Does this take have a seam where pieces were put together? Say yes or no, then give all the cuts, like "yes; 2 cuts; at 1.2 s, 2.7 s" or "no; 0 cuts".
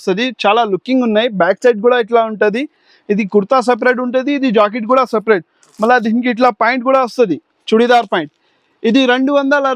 no; 0 cuts